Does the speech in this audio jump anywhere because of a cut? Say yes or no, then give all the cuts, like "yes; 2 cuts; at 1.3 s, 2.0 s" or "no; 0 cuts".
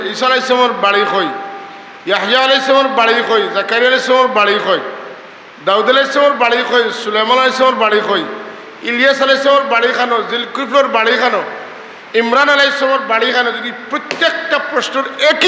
no; 0 cuts